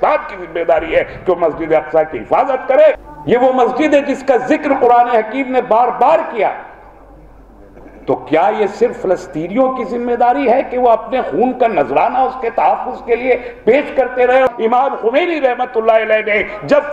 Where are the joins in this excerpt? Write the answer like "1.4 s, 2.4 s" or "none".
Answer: 3.0 s, 14.5 s